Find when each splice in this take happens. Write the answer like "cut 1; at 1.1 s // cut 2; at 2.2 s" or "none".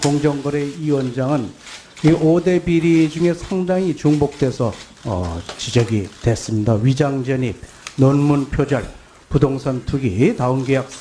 none